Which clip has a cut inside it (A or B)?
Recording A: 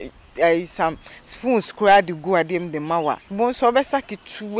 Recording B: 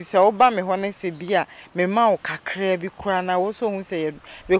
A